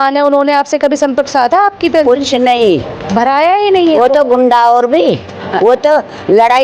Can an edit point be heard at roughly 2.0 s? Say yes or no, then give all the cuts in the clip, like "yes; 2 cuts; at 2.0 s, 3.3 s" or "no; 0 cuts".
no; 0 cuts